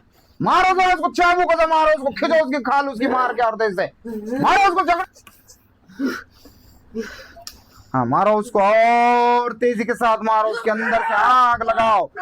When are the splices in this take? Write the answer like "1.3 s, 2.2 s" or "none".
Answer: 5.0 s